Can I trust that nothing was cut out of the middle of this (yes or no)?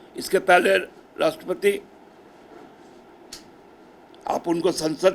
yes